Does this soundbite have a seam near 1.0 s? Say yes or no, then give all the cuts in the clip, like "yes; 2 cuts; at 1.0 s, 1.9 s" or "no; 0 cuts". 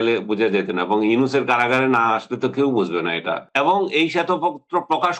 no; 1 cut; at 3.4 s